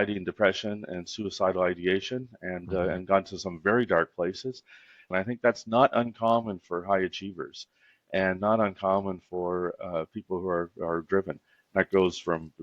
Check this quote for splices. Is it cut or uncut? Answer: cut